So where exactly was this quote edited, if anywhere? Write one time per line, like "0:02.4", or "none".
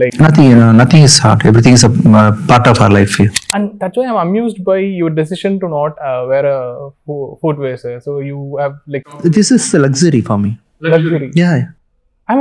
0:03.4